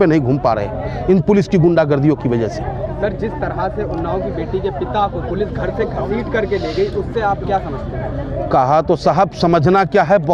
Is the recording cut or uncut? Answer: uncut